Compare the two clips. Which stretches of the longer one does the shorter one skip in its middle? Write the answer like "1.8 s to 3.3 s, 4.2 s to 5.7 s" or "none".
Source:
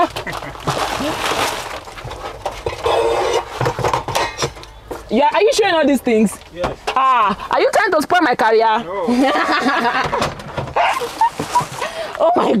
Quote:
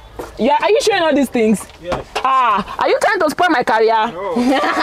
none